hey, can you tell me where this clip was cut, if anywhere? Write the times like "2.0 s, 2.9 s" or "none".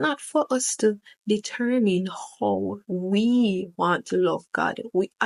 none